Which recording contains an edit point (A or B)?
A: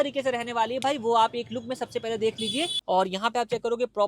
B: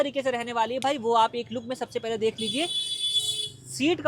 A